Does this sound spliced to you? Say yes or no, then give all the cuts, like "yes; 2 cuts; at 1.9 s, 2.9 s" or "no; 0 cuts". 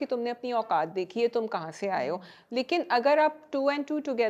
no; 0 cuts